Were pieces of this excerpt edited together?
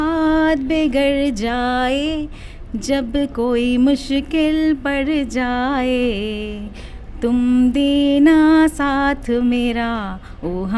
no; 0 cuts

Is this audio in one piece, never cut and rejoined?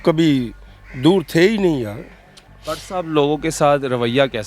no; 1 cut; at 2.5 s

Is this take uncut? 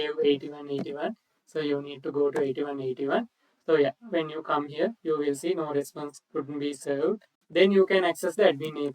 no; 1 cut; at 7.3 s

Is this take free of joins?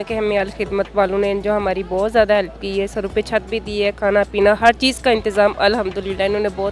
yes; 0 cuts

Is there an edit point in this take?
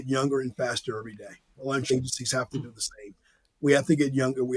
yes; 1 cut; at 1.8 s

